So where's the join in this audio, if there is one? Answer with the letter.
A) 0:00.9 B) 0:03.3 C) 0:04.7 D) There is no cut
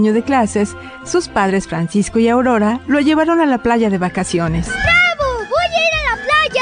C